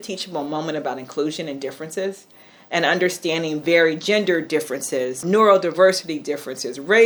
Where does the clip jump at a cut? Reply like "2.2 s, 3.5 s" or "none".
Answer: none